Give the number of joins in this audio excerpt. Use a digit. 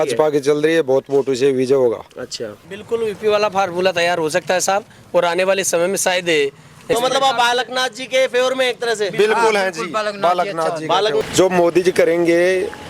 3